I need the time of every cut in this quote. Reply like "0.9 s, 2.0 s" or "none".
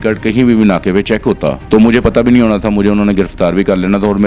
1.6 s